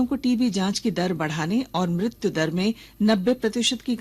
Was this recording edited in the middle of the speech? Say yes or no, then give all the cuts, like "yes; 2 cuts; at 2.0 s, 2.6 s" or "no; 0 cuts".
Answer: no; 0 cuts